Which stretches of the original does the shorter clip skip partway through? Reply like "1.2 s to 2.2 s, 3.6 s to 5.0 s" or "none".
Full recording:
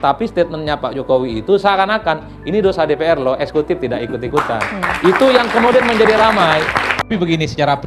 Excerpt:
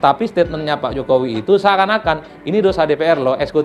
none

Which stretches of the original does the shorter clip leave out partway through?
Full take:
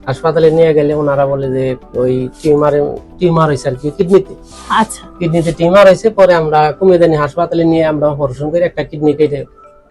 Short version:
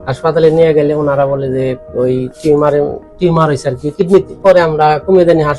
4.4 s to 6.1 s

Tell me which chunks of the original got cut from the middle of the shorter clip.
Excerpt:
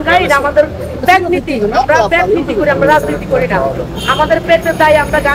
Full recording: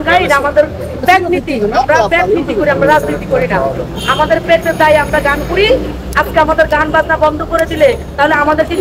none

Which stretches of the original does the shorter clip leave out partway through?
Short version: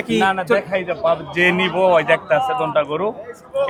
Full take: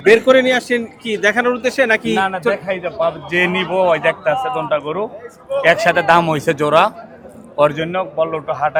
none

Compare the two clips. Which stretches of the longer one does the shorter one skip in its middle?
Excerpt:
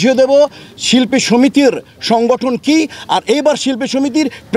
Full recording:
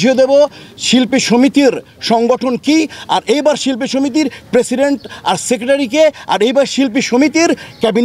none

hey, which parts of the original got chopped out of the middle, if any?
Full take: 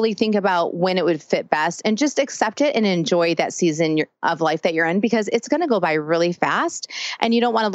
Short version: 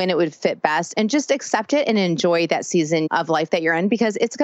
3.9 s to 4.2 s

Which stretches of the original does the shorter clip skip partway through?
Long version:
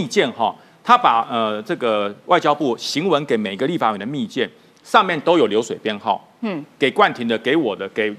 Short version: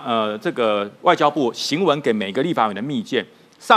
none

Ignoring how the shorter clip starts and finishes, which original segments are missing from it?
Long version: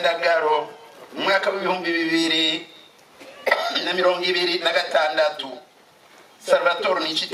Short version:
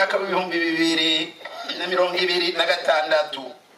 3.0 s to 3.8 s

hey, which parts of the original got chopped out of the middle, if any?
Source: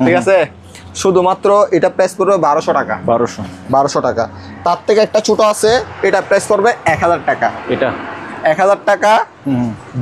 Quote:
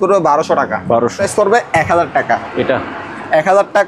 3.4 s to 6.3 s

